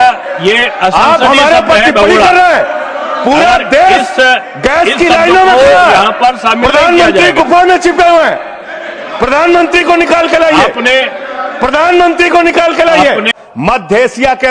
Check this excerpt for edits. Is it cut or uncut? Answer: cut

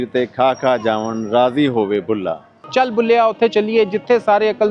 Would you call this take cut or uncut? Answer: cut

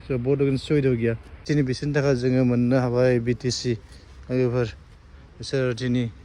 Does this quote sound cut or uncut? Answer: cut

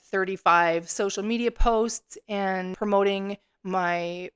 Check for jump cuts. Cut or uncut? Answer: cut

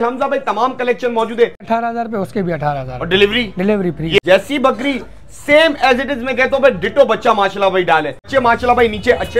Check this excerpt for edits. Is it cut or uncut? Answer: cut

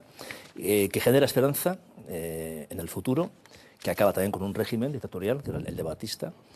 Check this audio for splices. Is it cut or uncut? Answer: cut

